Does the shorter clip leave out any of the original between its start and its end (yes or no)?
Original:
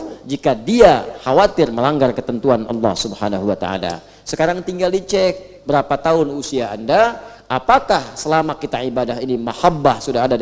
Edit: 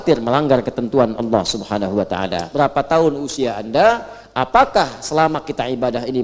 yes